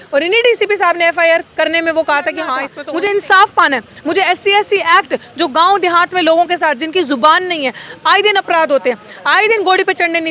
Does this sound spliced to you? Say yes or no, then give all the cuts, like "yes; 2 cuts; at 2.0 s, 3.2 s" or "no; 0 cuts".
yes; 1 cut; at 2.7 s